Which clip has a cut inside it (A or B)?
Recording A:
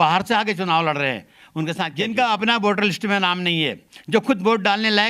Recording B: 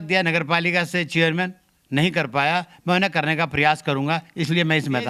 A